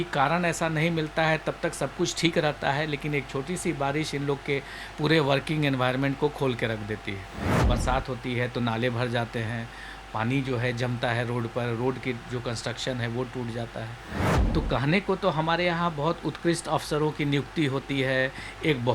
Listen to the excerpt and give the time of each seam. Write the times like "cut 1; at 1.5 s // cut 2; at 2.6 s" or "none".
cut 1; at 7.5 s // cut 2; at 14.4 s